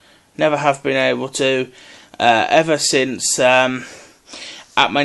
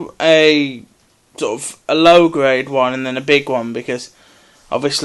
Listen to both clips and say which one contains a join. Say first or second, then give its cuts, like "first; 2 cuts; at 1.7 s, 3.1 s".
second; 1 cut; at 1.6 s